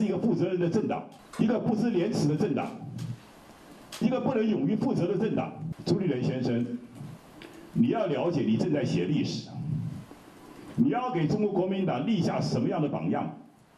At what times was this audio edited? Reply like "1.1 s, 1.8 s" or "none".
1.2 s, 5.7 s